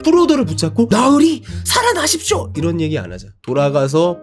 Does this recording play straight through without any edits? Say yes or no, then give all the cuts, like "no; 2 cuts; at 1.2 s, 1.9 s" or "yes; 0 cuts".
yes; 0 cuts